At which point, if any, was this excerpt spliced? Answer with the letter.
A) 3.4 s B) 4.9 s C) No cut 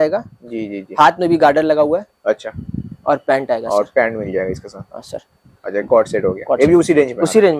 C